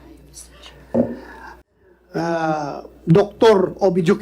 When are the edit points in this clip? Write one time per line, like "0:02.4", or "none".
0:01.5